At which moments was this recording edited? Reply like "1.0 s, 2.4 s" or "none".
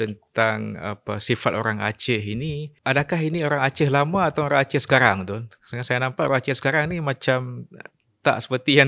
2.7 s